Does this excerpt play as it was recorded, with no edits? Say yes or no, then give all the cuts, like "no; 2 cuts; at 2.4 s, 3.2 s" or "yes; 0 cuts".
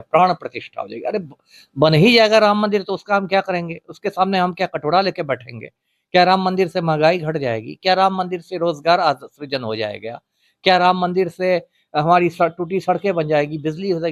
yes; 0 cuts